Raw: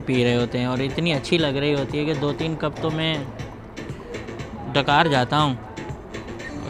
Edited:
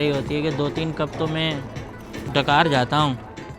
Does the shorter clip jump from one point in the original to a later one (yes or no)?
yes